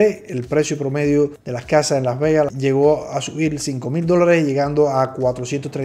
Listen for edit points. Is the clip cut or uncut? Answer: cut